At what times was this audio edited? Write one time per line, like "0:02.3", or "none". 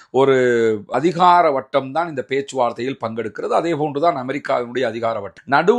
0:00.9